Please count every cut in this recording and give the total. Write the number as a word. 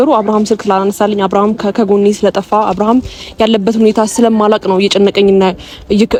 zero